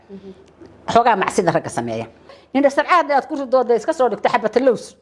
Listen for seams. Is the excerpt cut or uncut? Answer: cut